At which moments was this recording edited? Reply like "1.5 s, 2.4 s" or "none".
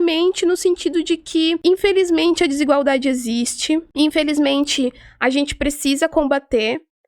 1.6 s, 3.9 s